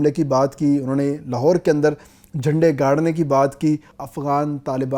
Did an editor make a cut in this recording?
yes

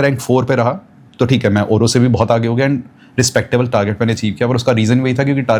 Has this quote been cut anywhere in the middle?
no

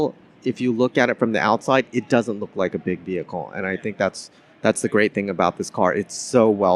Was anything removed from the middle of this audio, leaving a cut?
no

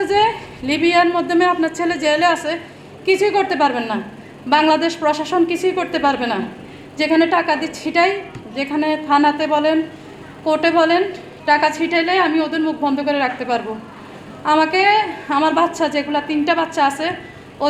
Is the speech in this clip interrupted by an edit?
no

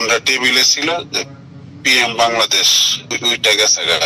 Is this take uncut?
no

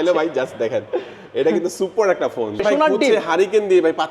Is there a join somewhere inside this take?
yes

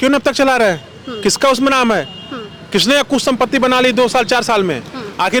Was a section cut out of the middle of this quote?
no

